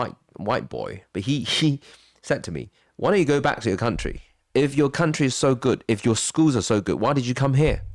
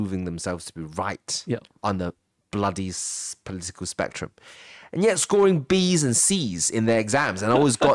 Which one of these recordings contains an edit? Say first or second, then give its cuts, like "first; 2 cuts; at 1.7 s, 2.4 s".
first; 1 cut; at 1.0 s